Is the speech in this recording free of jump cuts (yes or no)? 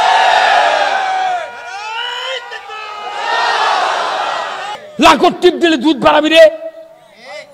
no